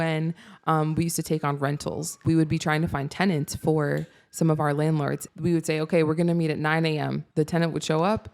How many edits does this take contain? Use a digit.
3